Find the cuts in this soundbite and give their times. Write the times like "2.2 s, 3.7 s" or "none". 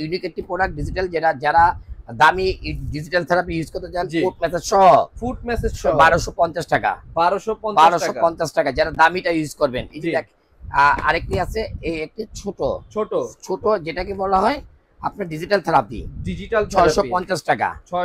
none